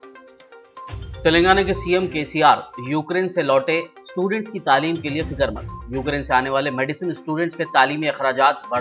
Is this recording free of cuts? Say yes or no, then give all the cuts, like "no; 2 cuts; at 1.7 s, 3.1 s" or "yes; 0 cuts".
no; 1 cut; at 0.9 s